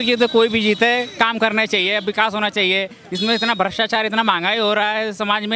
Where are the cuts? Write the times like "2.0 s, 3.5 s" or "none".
none